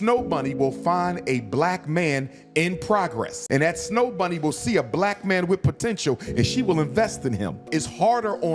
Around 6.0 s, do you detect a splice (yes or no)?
no